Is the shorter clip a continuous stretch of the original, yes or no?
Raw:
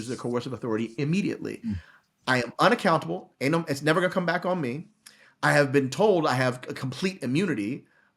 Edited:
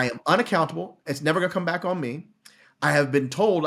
no